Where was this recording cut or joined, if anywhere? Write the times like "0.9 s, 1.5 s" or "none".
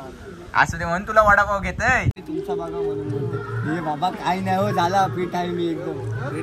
2.1 s